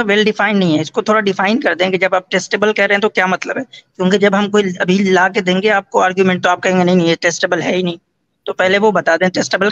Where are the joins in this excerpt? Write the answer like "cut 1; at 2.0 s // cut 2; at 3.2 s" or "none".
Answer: none

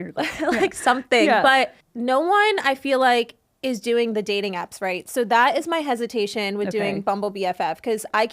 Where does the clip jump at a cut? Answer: cut 1; at 1.8 s

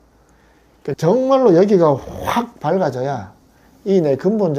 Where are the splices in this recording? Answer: cut 1; at 1.0 s

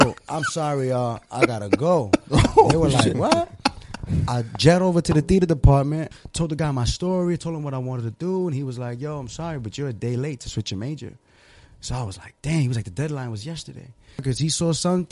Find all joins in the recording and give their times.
cut 1; at 6.1 s // cut 2; at 14.2 s

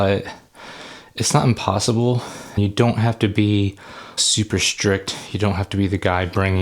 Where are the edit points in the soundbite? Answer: cut 1; at 2.6 s // cut 2; at 4.1 s

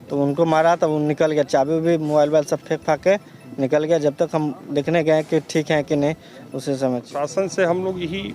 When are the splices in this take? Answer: cut 1; at 7.2 s

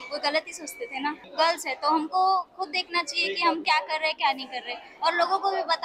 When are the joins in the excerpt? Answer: cut 1; at 1.3 s

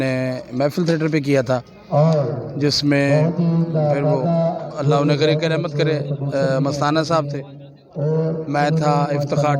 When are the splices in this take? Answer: none

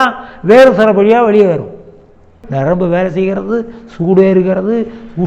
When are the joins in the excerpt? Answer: cut 1; at 2.4 s

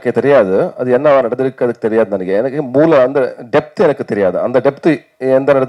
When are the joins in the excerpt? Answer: none

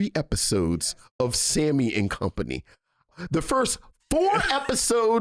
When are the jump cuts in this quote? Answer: cut 1; at 3.1 s

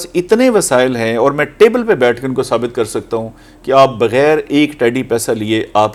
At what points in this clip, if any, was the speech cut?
none

